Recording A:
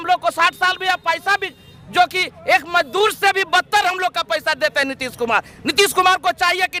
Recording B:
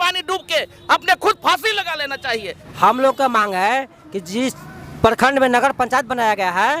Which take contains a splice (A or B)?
B